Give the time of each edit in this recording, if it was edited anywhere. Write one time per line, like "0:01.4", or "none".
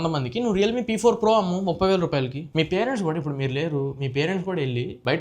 0:02.5